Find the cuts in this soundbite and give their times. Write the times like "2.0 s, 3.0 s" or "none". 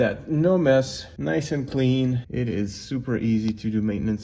1.0 s, 2.2 s